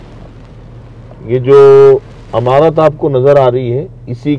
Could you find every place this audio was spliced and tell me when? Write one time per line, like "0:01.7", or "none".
none